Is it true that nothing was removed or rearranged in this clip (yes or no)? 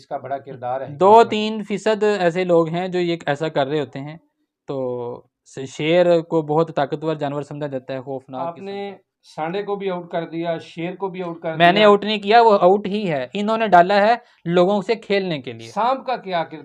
no